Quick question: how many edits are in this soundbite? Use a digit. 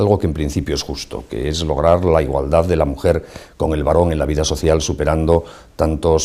0